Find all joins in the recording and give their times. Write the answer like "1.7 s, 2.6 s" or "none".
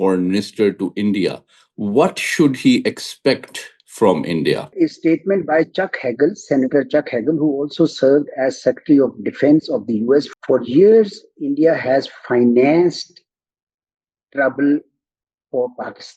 4.7 s, 10.3 s

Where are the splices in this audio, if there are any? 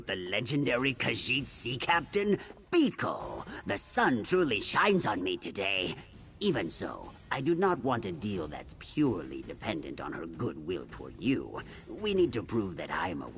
none

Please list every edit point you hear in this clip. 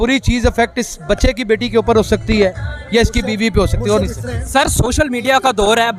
none

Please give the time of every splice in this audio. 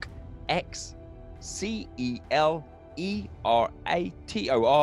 none

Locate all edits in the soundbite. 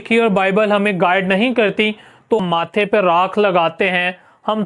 2.4 s

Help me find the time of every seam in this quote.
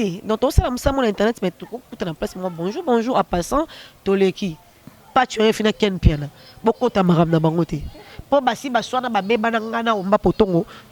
4.9 s

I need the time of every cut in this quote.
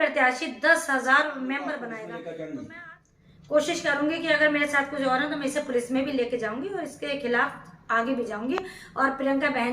2.0 s

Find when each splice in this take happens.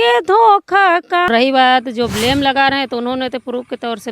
1.3 s

